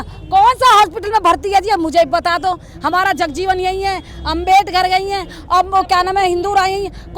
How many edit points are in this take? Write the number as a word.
zero